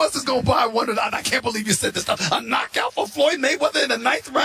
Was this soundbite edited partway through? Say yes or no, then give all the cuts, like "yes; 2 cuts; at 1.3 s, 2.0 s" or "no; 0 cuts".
yes; 1 cut; at 2.0 s